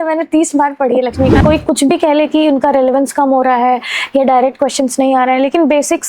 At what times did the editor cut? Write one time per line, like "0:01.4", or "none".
0:01.4